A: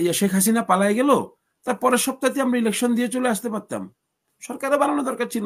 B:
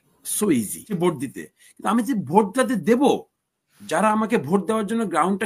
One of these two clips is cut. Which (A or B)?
B